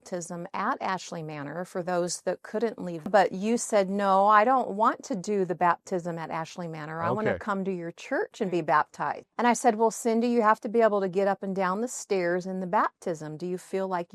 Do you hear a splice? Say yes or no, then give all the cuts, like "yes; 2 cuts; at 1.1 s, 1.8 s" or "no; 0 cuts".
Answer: yes; 2 cuts; at 3.1 s, 9.2 s